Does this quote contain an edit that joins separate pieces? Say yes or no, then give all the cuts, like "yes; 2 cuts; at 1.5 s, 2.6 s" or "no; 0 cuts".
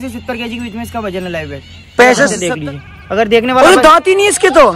yes; 1 cut; at 2.4 s